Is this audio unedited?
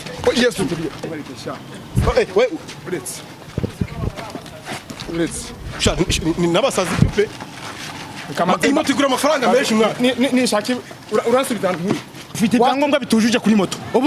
no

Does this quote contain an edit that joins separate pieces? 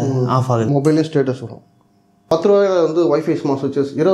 yes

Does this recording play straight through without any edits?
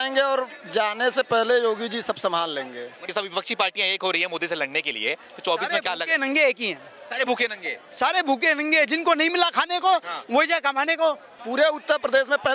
no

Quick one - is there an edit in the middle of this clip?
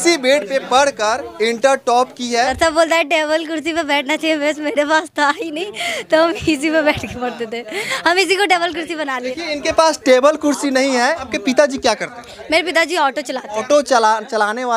yes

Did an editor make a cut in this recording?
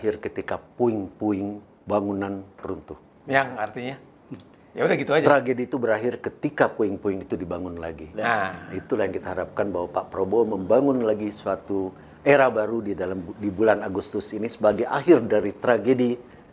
no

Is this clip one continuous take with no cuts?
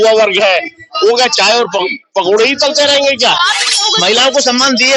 no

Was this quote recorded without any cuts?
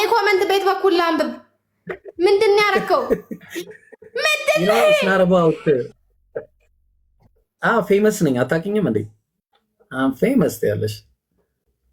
yes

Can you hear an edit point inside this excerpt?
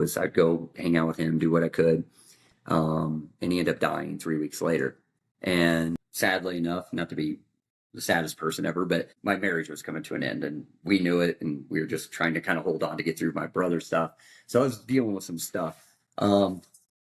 yes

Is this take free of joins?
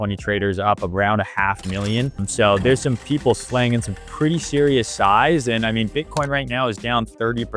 no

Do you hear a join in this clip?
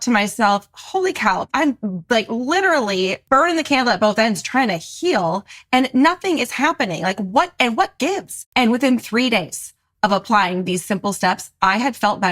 yes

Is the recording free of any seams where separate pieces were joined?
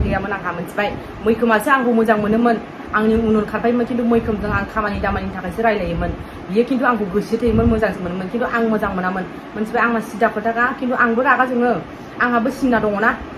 yes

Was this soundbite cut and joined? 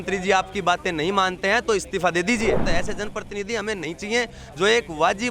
yes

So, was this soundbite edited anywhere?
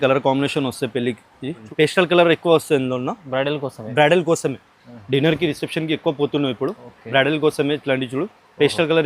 yes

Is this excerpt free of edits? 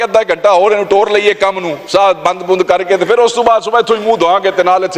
yes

